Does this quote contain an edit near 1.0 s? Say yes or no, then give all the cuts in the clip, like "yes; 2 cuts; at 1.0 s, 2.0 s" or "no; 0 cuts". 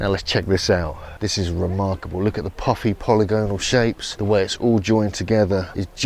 yes; 1 cut; at 1.0 s